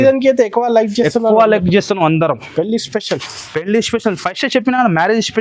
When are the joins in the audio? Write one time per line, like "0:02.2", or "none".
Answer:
none